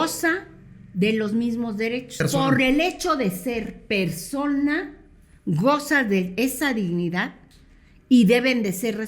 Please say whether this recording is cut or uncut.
cut